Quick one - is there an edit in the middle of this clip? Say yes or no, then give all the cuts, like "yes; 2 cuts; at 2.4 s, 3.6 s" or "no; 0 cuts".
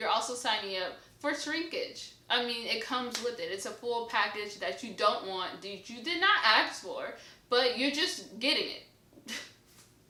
no; 0 cuts